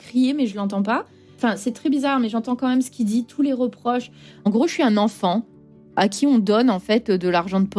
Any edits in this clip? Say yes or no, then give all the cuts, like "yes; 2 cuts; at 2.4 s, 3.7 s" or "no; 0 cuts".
yes; 3 cuts; at 1.3 s, 4.4 s, 6.0 s